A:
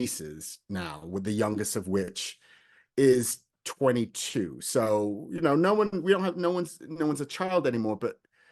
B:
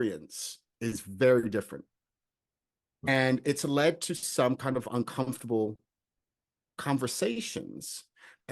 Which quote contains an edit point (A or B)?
B